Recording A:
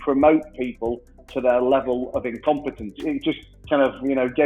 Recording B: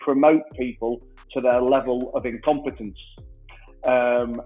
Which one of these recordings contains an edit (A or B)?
A